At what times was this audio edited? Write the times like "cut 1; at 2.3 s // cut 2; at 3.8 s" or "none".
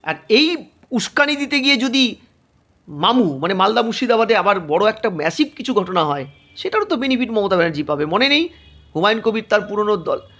none